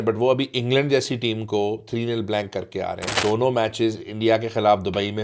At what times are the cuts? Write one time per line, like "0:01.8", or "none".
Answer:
0:03.2